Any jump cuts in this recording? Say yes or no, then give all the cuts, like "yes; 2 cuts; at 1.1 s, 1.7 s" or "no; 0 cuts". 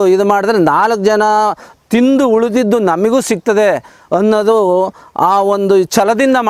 no; 0 cuts